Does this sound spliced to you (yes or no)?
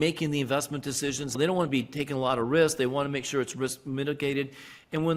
yes